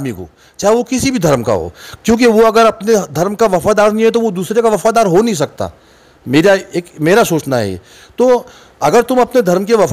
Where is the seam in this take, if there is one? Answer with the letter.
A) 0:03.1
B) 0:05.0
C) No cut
C